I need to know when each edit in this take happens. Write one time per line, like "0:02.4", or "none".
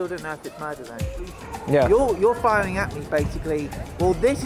0:01.4